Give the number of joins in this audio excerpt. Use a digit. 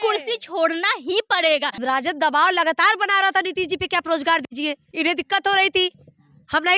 2